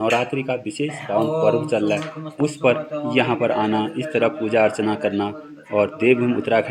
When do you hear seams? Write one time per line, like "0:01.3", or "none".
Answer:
none